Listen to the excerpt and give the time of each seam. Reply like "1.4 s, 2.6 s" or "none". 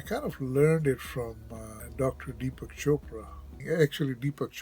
1.8 s, 3.6 s